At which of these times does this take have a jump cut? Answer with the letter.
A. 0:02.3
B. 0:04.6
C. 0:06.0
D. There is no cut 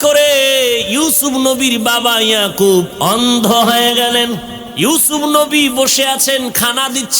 B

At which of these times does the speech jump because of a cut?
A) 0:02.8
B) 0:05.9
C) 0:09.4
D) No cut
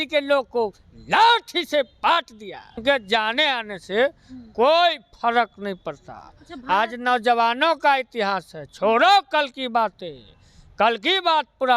A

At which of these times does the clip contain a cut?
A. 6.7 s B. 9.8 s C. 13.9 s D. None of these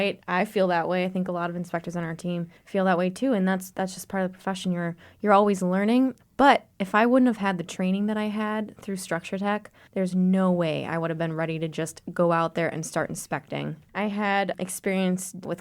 C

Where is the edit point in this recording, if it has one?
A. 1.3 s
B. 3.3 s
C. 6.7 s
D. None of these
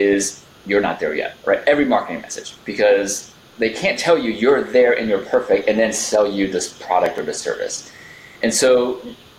A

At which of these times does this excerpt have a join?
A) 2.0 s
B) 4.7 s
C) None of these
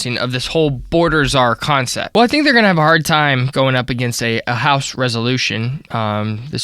A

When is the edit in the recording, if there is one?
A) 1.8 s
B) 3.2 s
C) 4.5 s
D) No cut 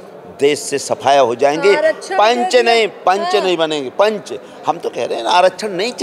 D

